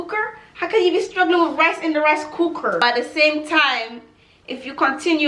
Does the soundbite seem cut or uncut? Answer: cut